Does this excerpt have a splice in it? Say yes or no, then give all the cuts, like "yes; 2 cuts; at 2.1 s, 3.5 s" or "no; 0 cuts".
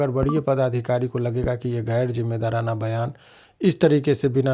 no; 0 cuts